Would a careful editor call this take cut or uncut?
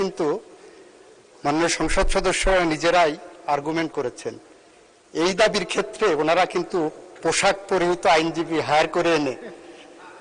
uncut